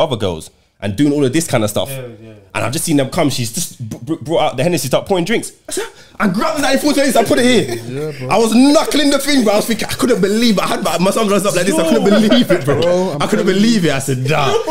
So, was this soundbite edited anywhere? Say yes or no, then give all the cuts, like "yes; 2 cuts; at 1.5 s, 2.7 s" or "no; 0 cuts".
no; 0 cuts